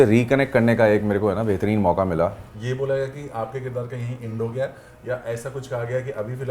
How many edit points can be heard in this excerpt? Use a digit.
1